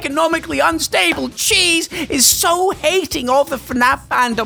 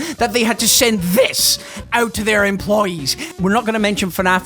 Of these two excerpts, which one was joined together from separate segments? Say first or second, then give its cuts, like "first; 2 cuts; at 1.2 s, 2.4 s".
second; 1 cut; at 3.2 s